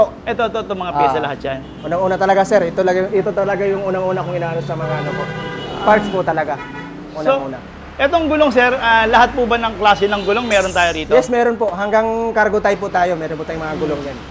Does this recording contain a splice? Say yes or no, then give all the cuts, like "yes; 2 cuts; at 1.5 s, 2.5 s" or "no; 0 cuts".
no; 0 cuts